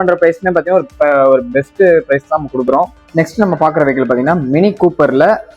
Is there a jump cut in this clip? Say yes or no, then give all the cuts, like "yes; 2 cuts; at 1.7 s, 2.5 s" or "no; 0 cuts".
yes; 1 cut; at 3.0 s